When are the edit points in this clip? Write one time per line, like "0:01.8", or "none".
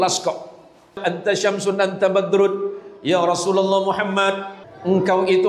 0:01.0
0:04.5